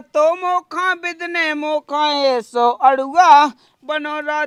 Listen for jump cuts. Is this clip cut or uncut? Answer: uncut